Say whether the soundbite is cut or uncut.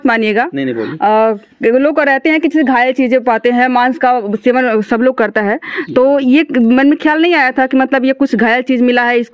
uncut